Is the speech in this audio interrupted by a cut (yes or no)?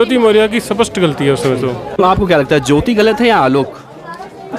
yes